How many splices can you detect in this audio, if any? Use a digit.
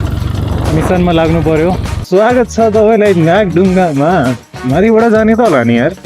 2